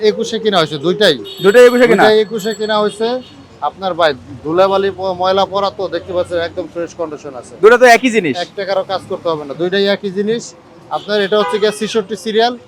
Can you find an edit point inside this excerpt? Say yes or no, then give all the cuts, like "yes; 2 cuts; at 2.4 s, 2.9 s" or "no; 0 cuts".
no; 0 cuts